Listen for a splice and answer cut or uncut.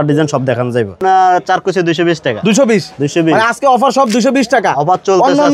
cut